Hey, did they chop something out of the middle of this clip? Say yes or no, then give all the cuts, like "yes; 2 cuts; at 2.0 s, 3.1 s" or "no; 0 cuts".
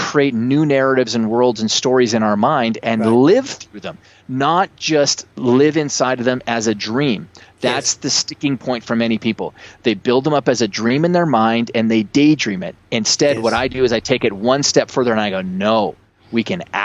no; 0 cuts